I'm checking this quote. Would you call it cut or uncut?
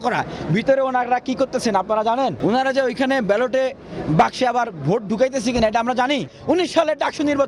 cut